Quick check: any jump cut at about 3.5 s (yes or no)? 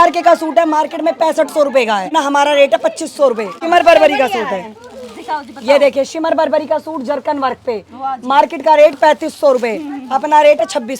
yes